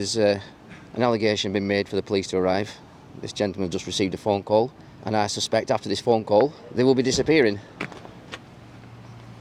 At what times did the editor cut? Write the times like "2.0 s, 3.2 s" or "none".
none